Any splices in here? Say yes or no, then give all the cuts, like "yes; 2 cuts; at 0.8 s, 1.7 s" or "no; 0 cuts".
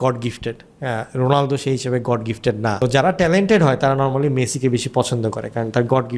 yes; 1 cut; at 2.8 s